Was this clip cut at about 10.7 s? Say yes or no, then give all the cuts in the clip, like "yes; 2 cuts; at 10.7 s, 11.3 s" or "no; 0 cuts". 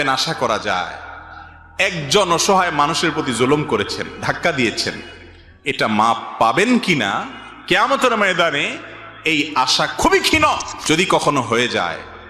yes; 1 cut; at 10.7 s